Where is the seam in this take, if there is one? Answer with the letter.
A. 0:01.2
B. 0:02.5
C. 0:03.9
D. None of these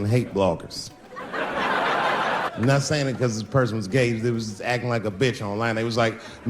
B